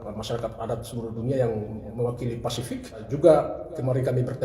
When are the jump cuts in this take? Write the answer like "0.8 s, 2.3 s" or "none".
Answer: 3.0 s